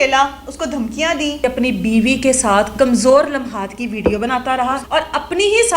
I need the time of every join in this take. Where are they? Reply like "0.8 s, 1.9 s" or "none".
1.4 s, 4.8 s